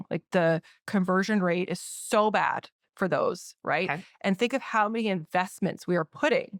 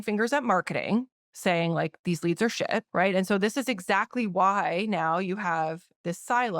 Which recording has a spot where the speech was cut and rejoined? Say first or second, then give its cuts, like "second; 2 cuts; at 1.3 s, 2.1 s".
second; 1 cut; at 2.9 s